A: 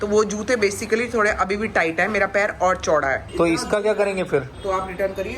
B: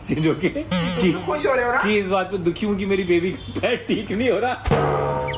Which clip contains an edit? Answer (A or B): A